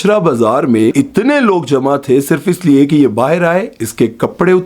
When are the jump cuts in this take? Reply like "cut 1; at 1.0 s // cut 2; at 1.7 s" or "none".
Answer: cut 1; at 0.9 s

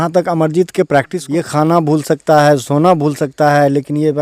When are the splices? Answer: cut 1; at 1.2 s

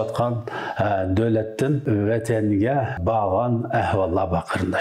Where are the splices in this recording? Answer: cut 1; at 1.8 s // cut 2; at 3.0 s

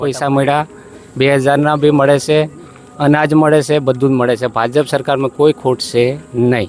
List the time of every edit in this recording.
none

